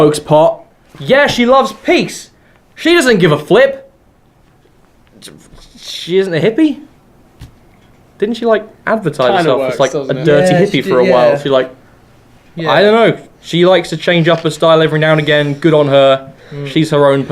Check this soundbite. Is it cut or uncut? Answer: cut